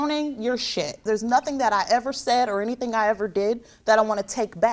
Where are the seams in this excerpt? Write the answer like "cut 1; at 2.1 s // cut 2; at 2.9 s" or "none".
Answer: cut 1; at 1.0 s

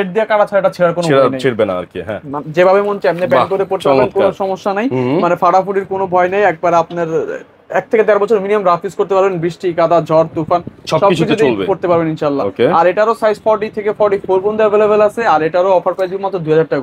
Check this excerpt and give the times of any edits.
none

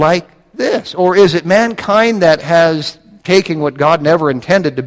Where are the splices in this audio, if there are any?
none

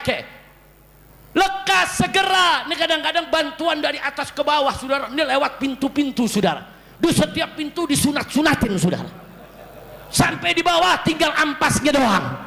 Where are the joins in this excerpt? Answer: none

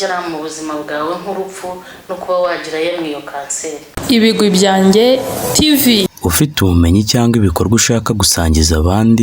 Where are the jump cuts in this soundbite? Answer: cut 1; at 3.9 s

